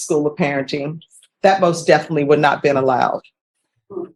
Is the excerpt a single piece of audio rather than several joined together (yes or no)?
yes